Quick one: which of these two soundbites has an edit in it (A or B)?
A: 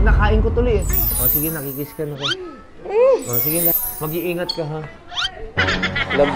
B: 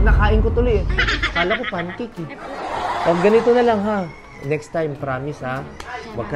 A